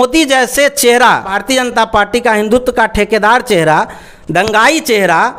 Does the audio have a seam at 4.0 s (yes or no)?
no